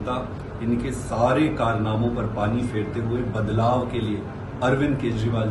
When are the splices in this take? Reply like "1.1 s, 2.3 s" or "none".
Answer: none